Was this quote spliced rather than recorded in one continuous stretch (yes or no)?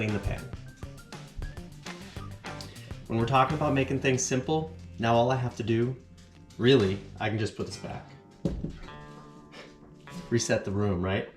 no